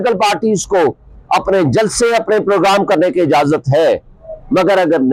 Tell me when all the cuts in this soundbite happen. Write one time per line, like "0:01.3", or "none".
none